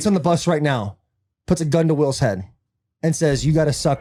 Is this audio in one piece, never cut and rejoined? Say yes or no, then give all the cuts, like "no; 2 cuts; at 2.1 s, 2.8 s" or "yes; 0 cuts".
yes; 0 cuts